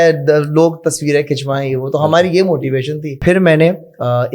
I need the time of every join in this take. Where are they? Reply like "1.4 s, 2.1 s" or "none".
3.1 s